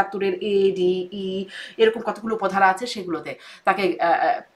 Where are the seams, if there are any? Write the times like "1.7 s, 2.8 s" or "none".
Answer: none